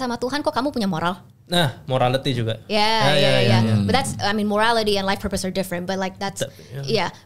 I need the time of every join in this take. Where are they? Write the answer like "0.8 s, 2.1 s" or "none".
none